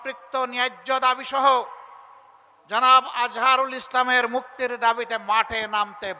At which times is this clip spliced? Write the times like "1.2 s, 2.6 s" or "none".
none